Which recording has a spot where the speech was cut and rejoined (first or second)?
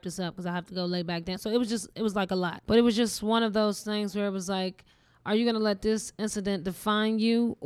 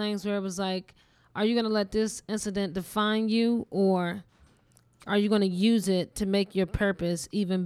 first